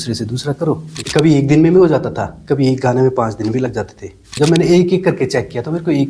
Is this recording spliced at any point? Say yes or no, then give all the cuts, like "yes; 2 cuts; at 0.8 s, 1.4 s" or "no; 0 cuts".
yes; 2 cuts; at 0.9 s, 4.3 s